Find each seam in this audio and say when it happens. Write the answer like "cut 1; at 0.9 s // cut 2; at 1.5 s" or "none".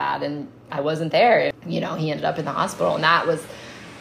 cut 1; at 1.5 s

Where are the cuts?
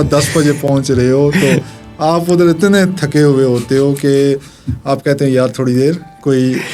none

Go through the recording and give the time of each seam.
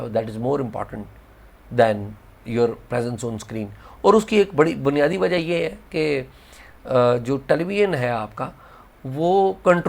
none

